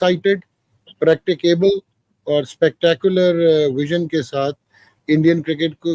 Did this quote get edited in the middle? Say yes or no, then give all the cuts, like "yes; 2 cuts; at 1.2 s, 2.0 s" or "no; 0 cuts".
no; 0 cuts